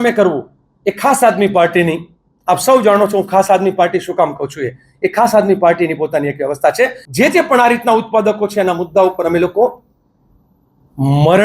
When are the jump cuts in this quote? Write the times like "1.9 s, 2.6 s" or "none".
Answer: 7.0 s